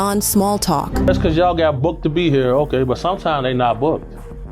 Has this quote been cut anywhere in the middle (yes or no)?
yes